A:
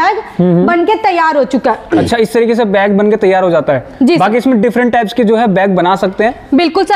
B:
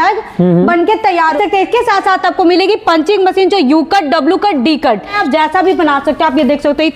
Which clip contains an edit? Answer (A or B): B